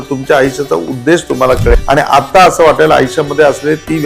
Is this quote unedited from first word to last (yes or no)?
no